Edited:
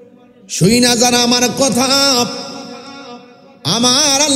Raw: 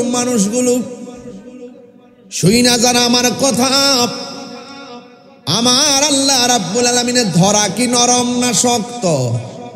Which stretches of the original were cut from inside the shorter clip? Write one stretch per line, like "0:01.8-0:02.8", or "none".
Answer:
none